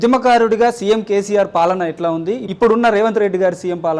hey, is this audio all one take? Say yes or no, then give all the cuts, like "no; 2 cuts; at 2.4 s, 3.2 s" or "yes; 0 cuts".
no; 1 cut; at 2.5 s